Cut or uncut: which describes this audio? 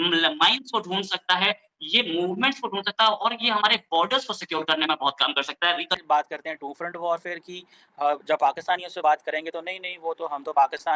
cut